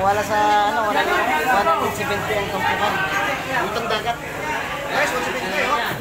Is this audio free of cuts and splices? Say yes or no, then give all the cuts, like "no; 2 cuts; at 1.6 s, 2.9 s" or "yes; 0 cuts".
yes; 0 cuts